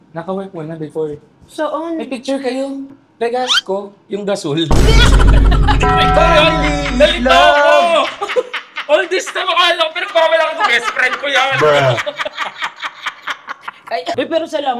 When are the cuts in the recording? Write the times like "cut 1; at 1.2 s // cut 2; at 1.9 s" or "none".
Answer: none